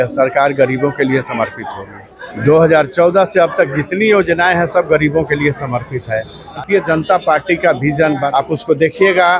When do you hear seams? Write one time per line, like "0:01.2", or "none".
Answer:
0:02.3
0:06.6
0:08.3